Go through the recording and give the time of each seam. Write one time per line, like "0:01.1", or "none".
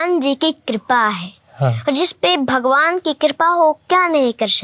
none